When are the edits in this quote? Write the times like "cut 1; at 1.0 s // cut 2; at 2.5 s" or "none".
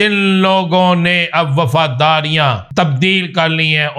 cut 1; at 2.6 s